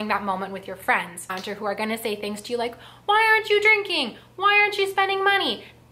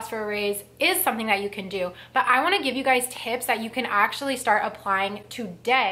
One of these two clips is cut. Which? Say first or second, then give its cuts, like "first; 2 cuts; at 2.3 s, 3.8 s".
first; 1 cut; at 1.2 s